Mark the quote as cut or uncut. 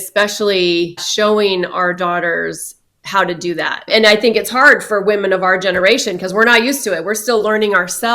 cut